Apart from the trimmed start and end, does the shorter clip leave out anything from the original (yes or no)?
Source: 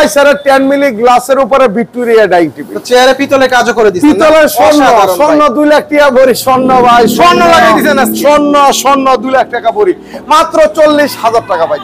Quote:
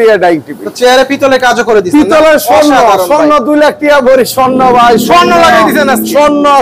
no